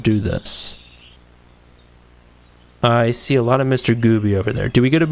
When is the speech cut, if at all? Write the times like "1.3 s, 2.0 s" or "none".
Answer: 1.2 s

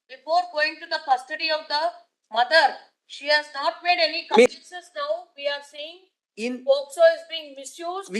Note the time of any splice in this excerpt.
4.6 s

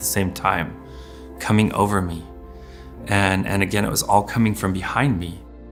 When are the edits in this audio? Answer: none

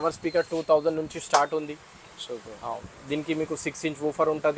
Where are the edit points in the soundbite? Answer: none

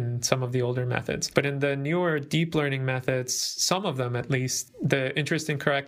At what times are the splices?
1.2 s, 4.6 s

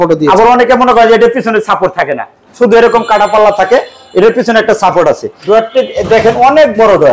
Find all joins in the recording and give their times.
5.3 s

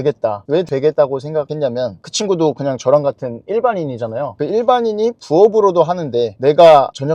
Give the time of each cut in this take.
none

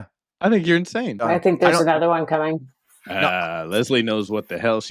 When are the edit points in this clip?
1.2 s

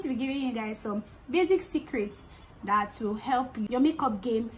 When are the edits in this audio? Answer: 3.7 s

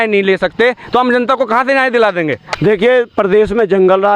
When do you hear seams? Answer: 2.5 s

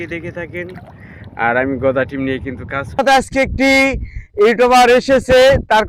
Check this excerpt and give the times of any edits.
2.9 s

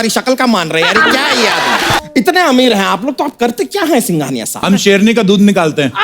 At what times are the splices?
2.0 s, 4.6 s

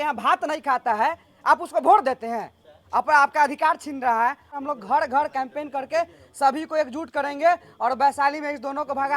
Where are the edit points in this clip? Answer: 4.5 s

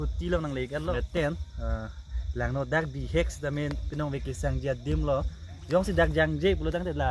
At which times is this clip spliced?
0.9 s

